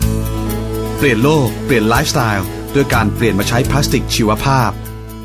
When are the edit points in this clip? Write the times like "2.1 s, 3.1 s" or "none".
none